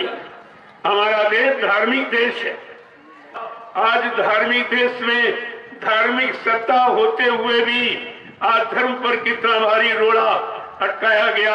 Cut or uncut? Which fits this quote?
cut